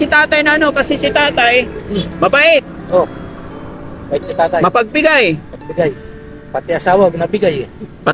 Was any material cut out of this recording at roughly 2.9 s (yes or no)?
no